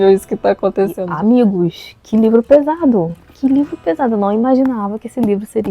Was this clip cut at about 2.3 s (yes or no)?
no